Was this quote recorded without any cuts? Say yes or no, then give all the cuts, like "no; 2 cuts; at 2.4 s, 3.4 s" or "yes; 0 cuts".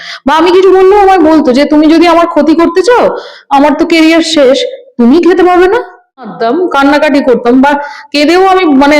no; 1 cut; at 6.3 s